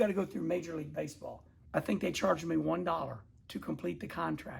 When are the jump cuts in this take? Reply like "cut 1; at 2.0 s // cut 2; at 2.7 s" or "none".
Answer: cut 1; at 1.5 s

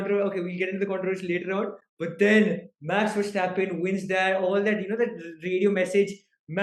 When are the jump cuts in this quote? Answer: none

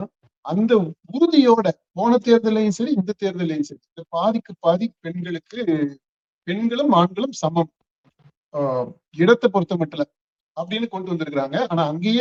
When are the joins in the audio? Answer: none

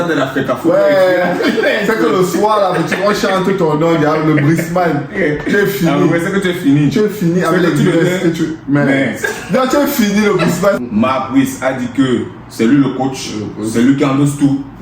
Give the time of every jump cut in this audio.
cut 1; at 10.8 s

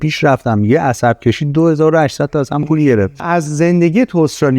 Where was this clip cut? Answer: cut 1; at 3.2 s

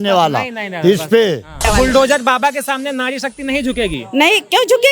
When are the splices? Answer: cut 1; at 1.7 s

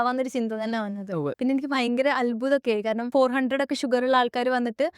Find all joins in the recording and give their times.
cut 1; at 1.3 s // cut 2; at 3.1 s

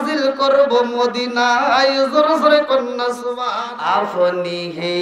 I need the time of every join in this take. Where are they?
cut 1; at 3.7 s

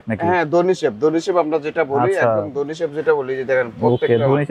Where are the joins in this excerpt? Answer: none

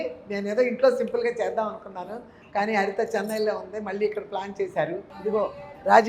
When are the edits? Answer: cut 1; at 5.1 s

